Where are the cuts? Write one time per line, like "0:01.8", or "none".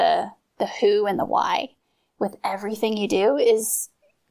none